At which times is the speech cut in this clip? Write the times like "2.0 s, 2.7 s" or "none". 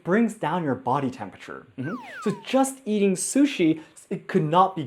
none